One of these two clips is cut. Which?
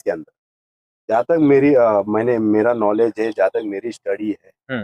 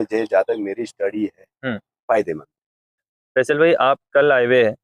second; 1 cut; at 3.1 s

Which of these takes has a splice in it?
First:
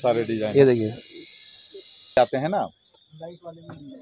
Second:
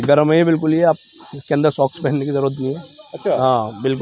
first; 1 cut; at 2.2 s

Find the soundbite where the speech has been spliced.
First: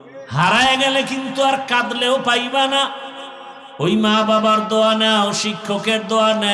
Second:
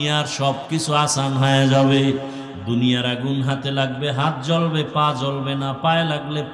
second; 1 cut; at 2.4 s

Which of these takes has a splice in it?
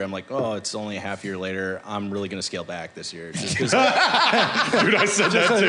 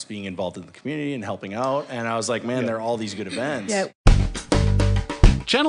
second; 1 cut; at 3.9 s

